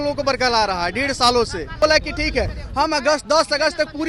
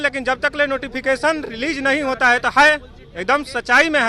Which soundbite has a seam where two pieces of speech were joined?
first; 1 cut; at 1.8 s

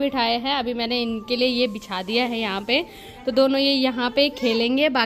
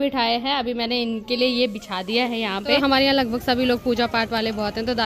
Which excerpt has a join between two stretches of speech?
second; 1 cut; at 2.8 s

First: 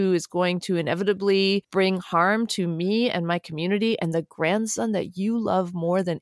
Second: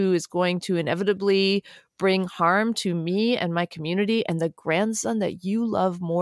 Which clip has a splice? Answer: first; 1 cut; at 1.7 s

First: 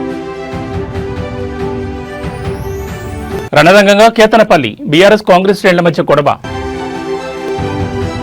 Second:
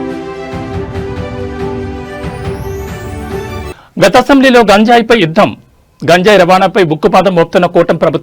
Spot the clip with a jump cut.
first; 1 cut; at 3.4 s

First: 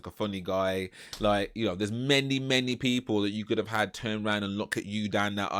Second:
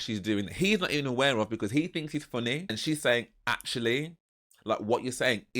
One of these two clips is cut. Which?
second; 1 cut; at 2.7 s

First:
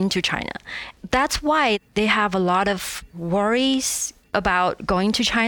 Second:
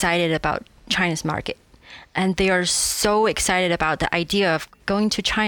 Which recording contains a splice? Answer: first; 2 cuts; at 0.9 s, 4.3 s

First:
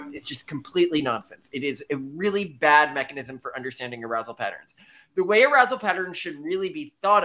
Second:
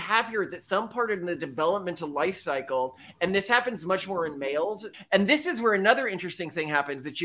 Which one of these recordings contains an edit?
second; 1 cut; at 4.9 s

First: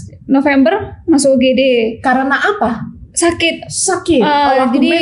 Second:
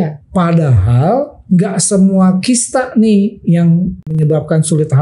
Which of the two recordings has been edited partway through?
second; 1 cut; at 4.1 s

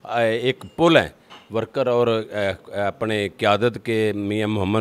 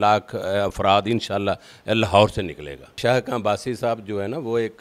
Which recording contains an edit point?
second; 1 cut; at 3.0 s

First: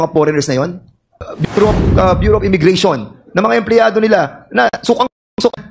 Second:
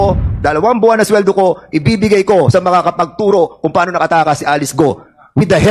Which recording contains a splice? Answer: first; 1 cut; at 1.1 s

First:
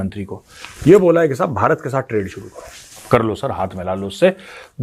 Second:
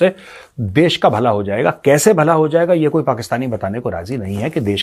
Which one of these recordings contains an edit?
first; 1 cut; at 3.0 s

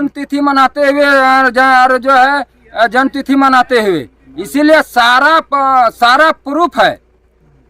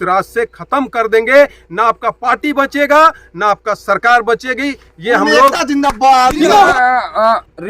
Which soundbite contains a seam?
second; 1 cut; at 6.7 s

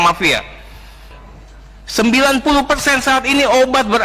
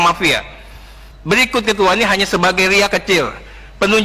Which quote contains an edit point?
first; 1 cut; at 1.1 s

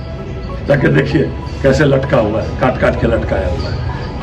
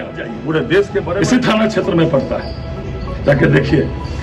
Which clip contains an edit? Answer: second; 1 cut; at 1.1 s

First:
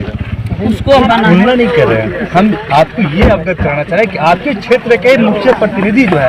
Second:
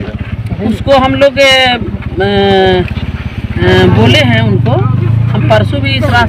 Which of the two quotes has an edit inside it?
first; 1 cut; at 1.0 s

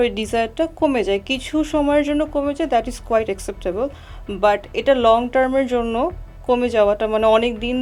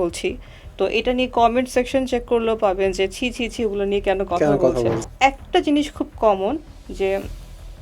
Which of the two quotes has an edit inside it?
second; 1 cut; at 5.0 s

